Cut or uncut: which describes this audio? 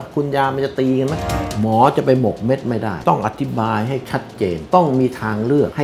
cut